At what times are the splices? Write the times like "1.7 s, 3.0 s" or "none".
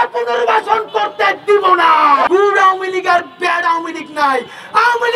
2.3 s